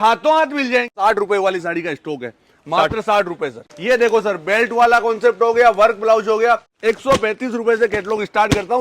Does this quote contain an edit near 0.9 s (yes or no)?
yes